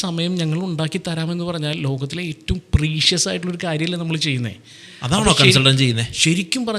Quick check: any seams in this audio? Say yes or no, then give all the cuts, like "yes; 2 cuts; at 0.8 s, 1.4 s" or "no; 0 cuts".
no; 0 cuts